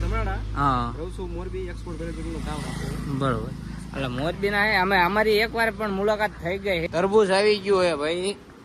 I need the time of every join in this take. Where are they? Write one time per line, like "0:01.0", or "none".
0:06.9